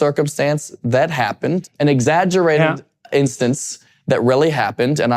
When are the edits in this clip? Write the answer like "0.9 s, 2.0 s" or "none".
1.6 s